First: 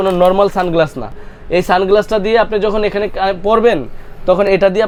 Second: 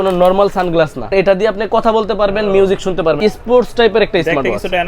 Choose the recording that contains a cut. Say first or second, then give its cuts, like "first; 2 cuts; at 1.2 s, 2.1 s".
second; 2 cuts; at 1.1 s, 3.2 s